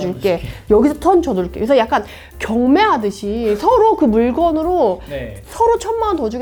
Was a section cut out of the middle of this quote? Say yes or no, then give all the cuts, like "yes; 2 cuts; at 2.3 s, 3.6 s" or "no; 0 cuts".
no; 0 cuts